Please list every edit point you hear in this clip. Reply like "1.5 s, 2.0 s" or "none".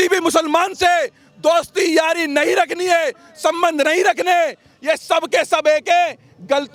none